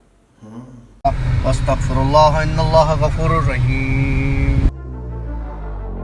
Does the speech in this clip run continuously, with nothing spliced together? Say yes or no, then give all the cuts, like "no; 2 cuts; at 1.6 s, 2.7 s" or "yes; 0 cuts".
no; 1 cut; at 1.0 s